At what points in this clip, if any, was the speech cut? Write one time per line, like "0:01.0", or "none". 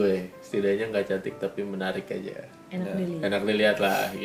none